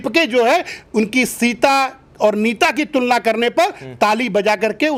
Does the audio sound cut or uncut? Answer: uncut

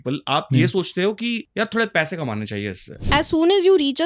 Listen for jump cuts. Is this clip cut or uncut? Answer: cut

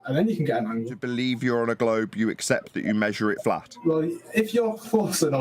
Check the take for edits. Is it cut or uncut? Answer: cut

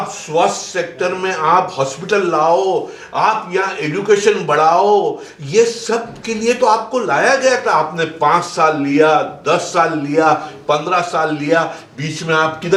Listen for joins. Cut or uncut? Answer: uncut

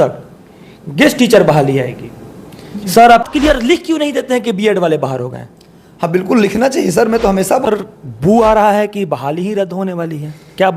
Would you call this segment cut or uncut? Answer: cut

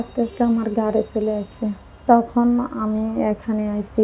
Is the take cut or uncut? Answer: cut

